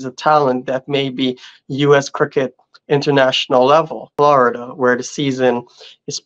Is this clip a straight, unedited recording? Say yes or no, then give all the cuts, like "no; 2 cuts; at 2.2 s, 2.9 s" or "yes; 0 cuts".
no; 1 cut; at 4.0 s